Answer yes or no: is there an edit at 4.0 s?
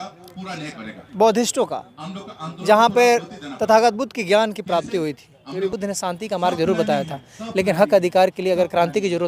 no